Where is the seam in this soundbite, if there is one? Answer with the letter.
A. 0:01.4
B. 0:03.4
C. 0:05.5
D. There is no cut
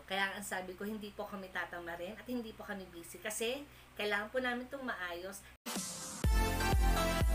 C